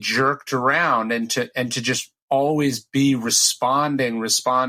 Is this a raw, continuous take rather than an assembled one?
yes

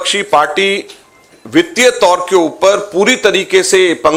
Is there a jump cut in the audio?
no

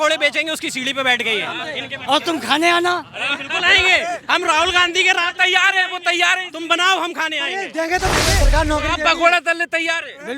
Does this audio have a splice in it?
yes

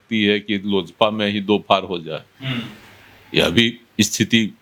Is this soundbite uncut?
yes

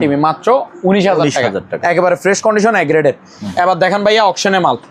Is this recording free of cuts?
yes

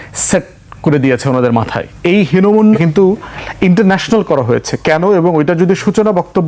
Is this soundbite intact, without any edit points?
no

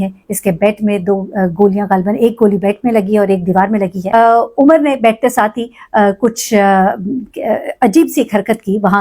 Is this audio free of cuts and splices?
no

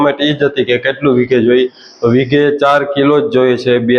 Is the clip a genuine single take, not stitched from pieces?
yes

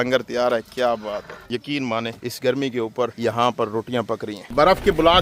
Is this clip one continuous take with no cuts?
no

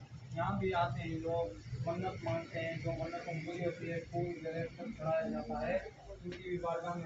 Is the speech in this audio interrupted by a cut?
no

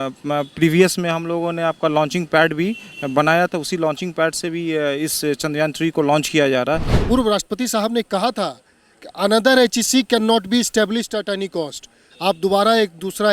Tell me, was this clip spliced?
yes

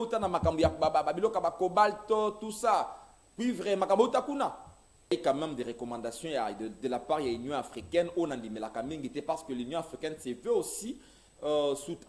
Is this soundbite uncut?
no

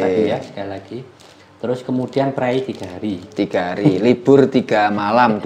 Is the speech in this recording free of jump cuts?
yes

